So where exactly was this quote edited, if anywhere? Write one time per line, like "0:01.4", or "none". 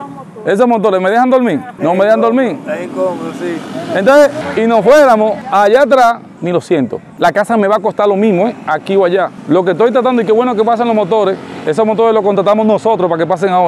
0:01.7
0:04.4
0:06.4